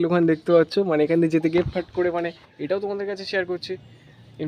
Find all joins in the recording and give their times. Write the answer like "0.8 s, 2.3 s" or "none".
2.4 s

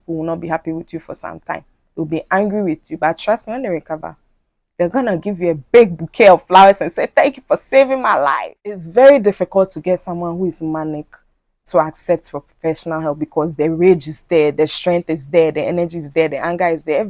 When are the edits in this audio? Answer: 8.8 s

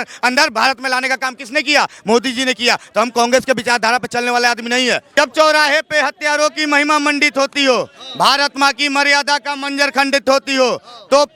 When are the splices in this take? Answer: 5.1 s

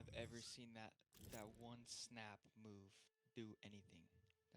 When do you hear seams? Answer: none

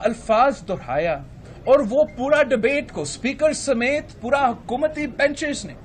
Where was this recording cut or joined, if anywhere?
none

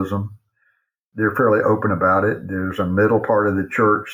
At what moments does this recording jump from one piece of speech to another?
1.0 s

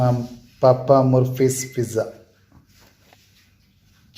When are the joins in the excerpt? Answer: 2.9 s

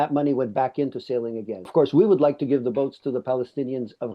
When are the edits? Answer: 1.6 s

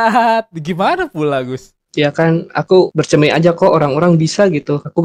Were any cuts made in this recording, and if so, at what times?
1.7 s

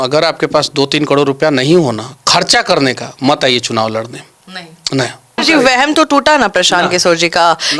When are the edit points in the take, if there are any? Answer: 5.4 s

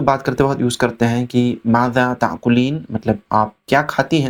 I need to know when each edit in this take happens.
none

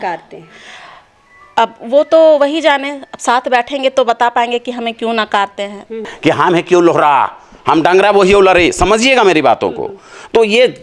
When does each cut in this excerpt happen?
6.1 s

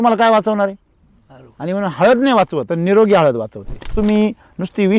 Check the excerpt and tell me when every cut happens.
2.7 s, 3.9 s

